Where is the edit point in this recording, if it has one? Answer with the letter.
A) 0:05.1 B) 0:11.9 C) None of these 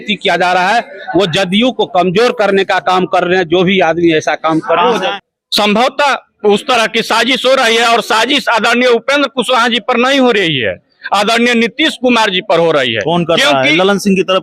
A